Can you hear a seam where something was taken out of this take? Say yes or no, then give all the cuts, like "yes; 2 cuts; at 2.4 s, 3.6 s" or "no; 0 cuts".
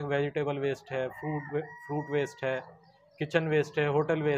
no; 0 cuts